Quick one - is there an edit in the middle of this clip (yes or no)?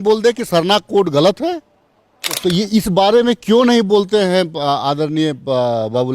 yes